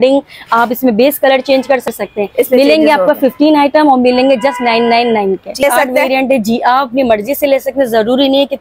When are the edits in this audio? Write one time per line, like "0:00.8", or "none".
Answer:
0:01.9
0:05.6